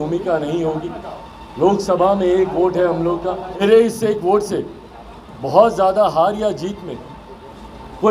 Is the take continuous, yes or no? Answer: no